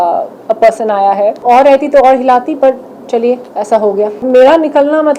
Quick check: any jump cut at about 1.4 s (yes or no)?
yes